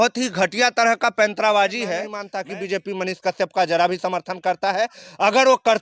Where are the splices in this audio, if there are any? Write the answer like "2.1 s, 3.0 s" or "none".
2.2 s